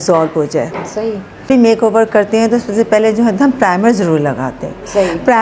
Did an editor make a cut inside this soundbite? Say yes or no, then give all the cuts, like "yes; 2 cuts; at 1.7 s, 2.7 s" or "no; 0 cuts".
yes; 1 cut; at 1.4 s